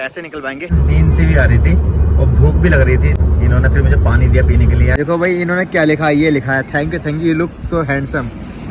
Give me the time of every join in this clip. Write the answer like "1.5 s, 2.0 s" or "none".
0.7 s, 3.2 s, 4.9 s